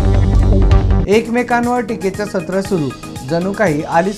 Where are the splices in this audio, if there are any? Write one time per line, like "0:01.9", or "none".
none